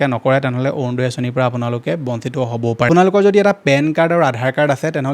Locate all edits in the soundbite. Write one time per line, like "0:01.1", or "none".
0:02.9